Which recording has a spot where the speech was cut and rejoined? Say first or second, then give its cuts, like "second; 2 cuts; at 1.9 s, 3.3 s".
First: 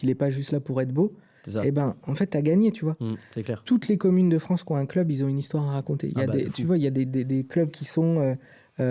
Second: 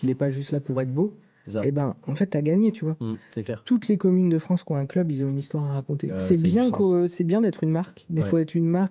second; 1 cut; at 6.1 s